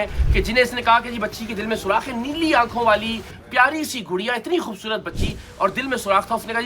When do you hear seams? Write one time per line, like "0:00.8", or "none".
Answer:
none